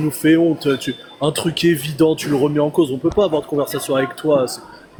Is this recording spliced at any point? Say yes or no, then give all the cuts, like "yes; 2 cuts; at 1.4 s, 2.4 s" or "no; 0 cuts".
no; 0 cuts